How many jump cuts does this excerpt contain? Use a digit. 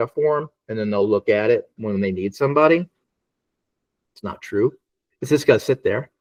0